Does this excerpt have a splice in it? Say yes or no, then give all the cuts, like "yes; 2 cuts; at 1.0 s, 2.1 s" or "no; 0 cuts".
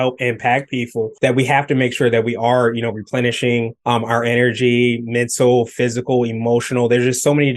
yes; 2 cuts; at 1.1 s, 3.7 s